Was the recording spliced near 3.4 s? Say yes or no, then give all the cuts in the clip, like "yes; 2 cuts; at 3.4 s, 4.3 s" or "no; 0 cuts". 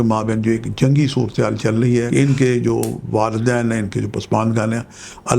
no; 1 cut; at 2.1 s